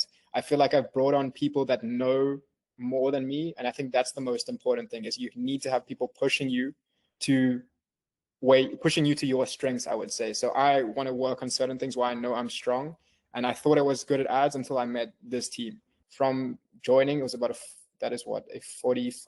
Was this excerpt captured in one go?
no; 1 cut; at 16.0 s

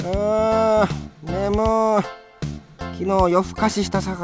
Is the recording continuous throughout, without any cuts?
yes; 0 cuts

